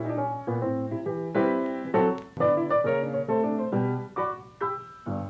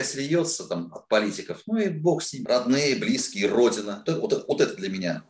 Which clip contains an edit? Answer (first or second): second